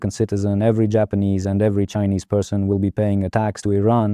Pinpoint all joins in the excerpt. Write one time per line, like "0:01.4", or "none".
none